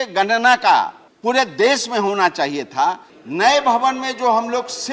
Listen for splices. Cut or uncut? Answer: cut